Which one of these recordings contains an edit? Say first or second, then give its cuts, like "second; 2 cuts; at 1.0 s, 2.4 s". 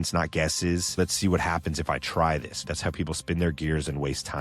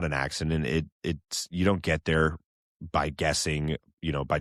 first; 2 cuts; at 1.0 s, 2.7 s